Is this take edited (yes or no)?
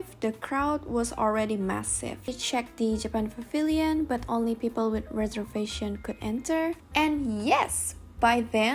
yes